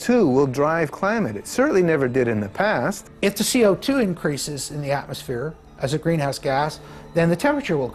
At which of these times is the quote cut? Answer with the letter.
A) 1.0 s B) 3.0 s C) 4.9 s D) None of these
B